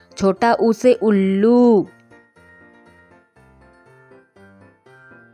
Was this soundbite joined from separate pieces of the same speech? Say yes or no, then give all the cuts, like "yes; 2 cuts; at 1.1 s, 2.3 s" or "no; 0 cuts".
no; 0 cuts